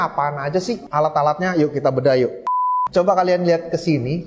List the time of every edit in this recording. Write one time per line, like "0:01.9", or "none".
0:00.8
0:02.6